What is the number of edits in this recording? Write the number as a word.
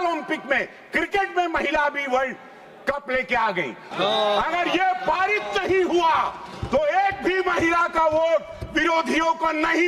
one